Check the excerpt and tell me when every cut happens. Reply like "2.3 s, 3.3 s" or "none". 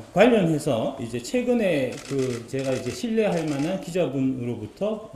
none